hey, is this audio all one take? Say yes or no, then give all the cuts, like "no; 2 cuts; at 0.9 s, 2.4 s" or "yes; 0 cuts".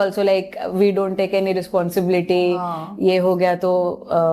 yes; 0 cuts